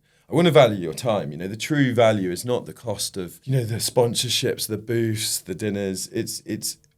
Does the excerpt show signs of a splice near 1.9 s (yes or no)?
no